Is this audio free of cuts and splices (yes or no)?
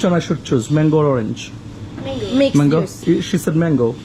no